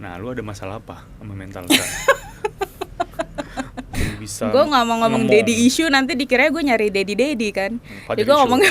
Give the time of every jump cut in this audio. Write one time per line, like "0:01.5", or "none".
0:03.9